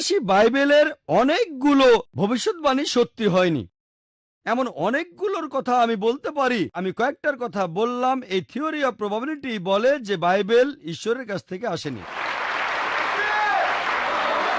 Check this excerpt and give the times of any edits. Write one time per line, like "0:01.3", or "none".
0:06.8
0:12.1